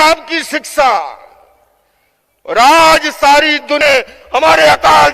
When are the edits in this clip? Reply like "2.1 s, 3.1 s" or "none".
3.8 s